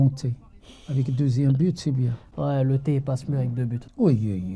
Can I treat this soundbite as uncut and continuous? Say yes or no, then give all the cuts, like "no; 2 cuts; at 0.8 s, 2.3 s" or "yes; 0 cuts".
yes; 0 cuts